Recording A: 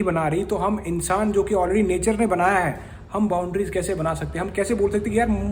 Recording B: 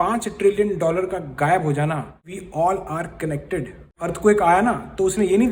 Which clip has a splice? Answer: B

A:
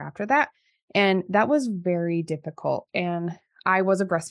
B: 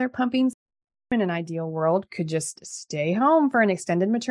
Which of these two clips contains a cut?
B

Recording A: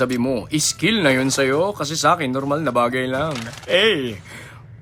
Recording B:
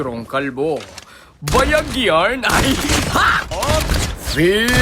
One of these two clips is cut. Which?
B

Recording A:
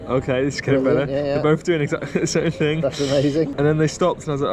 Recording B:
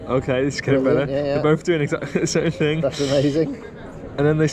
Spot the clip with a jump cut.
A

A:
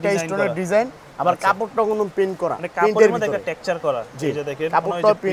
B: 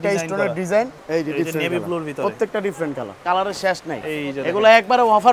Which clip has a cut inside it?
B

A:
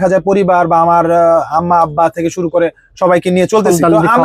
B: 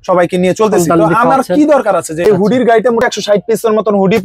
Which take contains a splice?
B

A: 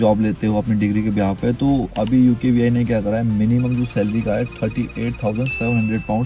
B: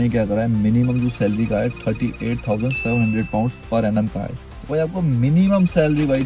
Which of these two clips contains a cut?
B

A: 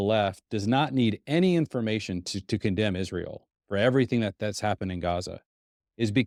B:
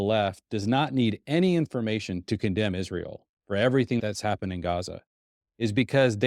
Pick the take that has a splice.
B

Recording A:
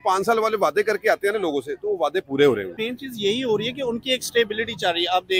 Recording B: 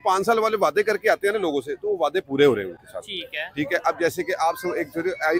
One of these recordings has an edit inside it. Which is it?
A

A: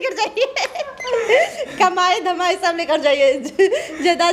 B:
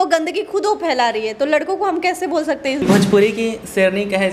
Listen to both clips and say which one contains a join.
B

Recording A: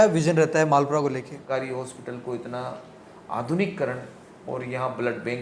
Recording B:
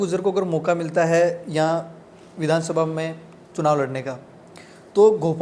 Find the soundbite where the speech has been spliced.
A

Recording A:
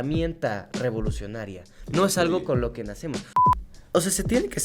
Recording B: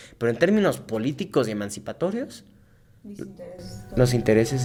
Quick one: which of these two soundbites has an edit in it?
A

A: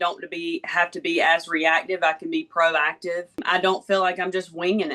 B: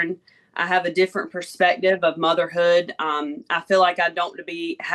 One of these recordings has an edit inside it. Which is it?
A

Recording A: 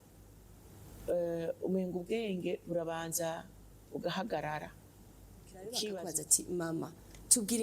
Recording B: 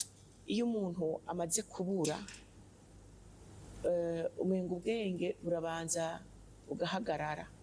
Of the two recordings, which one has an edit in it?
A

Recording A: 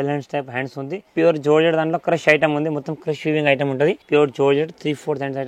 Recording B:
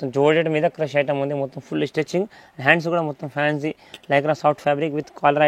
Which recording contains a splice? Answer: A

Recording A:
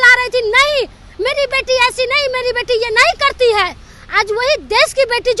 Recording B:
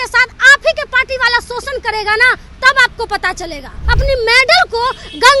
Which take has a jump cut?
B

